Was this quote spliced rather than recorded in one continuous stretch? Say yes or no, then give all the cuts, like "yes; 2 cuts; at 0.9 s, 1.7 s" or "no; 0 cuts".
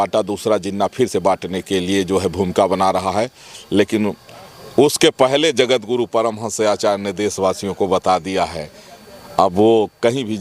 no; 0 cuts